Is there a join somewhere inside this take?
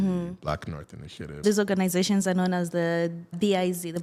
no; 0 cuts

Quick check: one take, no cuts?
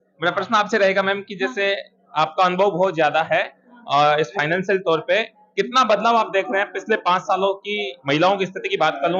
yes; 0 cuts

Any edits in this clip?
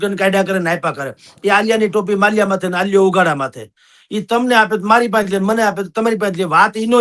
no; 0 cuts

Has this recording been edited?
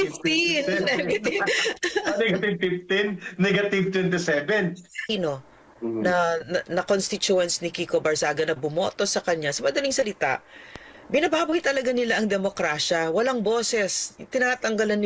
yes; 1 cut; at 5.1 s

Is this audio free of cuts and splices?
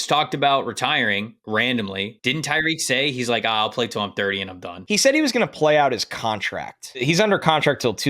no; 4 cuts; at 1.4 s, 2.4 s, 4.7 s, 7.0 s

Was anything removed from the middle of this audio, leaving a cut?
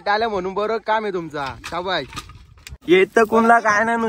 yes; 1 cut; at 2.8 s

